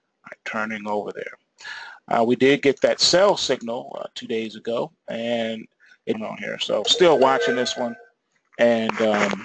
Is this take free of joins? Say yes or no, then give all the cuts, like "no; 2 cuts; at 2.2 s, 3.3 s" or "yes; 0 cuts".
yes; 0 cuts